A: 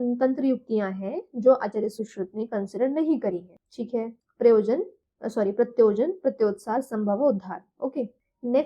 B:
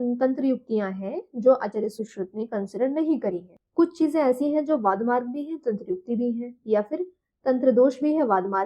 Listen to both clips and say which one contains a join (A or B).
B